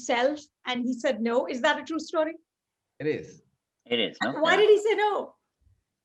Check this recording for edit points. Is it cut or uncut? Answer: uncut